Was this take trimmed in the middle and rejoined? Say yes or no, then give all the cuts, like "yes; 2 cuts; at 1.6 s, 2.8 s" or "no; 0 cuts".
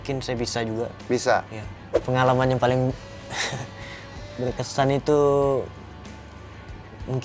yes; 1 cut; at 1.9 s